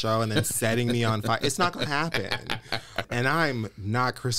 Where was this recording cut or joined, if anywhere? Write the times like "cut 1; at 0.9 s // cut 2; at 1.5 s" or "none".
cut 1; at 3.1 s